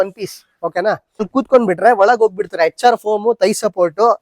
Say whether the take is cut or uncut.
cut